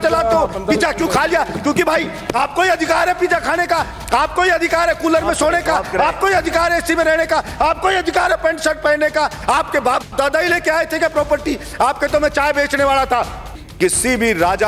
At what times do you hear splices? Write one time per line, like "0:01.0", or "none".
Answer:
0:13.6